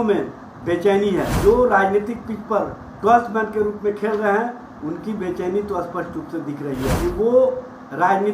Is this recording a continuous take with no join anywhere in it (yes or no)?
no